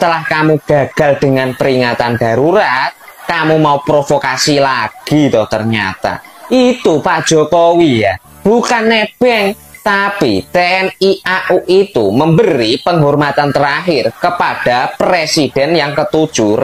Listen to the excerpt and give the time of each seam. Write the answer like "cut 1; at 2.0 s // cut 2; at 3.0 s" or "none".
none